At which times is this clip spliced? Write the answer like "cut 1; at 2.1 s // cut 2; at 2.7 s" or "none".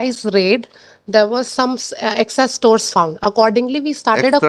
none